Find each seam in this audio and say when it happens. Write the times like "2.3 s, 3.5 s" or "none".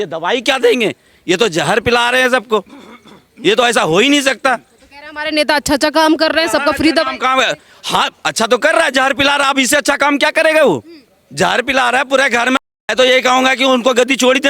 12.8 s